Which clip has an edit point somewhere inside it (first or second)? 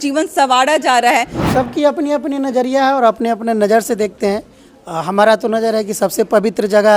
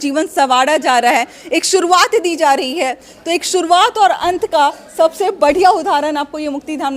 first